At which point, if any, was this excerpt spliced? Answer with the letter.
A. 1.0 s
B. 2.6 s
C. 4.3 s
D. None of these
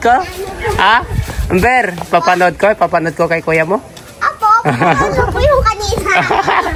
D